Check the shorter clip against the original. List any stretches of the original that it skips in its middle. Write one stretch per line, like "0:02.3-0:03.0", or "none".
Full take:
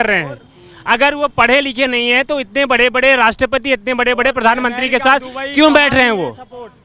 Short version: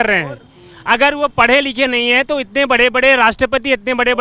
none